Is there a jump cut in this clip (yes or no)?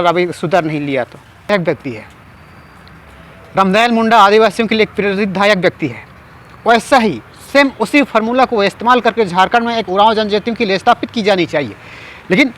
yes